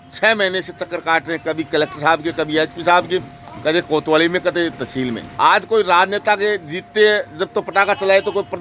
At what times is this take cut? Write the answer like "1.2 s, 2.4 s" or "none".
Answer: 5.3 s